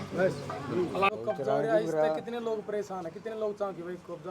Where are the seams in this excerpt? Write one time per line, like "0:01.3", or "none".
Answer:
0:01.1